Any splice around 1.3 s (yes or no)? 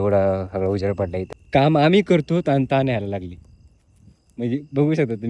yes